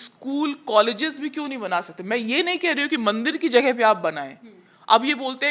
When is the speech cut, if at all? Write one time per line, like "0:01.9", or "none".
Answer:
none